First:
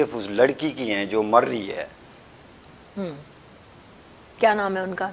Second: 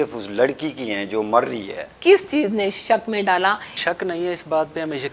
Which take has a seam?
second; 2 cuts; at 1.9 s, 3.7 s

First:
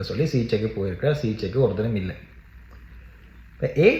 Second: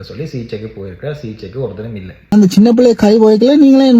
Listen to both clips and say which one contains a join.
second; 1 cut; at 2.3 s

